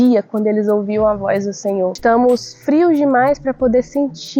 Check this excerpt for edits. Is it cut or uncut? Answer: cut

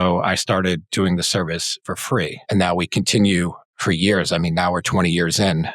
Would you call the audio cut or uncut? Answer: cut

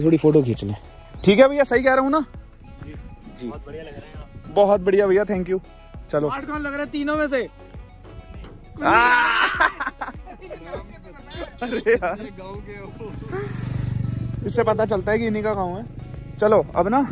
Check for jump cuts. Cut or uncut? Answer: uncut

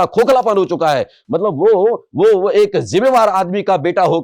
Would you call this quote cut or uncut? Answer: uncut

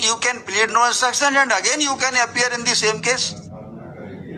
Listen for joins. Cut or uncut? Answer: uncut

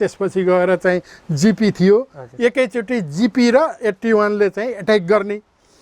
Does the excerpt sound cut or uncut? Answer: uncut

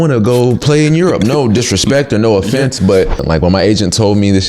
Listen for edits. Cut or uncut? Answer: cut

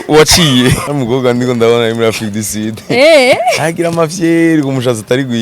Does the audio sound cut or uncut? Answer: cut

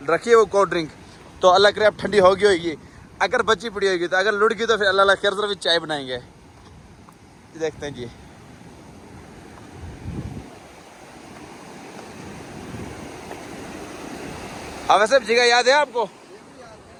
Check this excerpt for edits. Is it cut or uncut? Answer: uncut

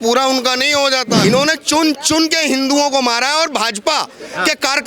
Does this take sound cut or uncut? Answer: cut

